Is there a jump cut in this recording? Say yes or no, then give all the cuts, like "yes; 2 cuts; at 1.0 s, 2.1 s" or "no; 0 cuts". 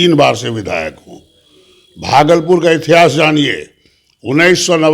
no; 0 cuts